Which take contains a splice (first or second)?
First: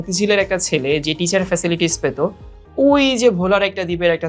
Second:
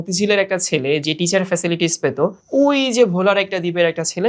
second